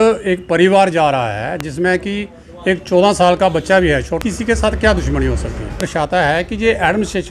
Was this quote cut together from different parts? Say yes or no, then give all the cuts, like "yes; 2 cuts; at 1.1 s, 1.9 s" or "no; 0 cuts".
yes; 2 cuts; at 4.2 s, 5.8 s